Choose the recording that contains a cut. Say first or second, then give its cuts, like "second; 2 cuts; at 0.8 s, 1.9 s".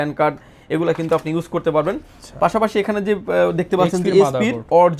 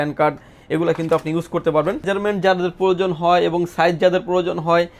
second; 1 cut; at 2.1 s